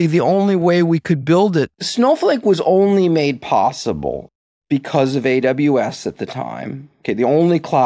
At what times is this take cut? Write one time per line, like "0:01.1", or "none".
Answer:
0:01.8